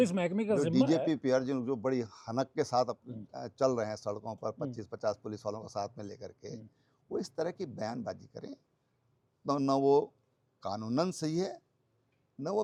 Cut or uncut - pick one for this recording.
uncut